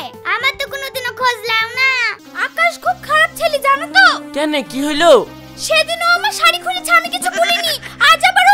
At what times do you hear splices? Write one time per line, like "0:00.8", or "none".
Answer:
0:02.2